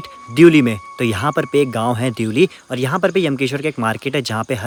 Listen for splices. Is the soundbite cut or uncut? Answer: uncut